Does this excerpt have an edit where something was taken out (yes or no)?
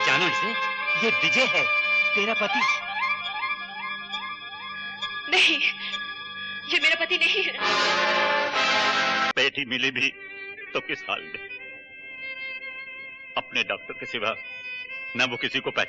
yes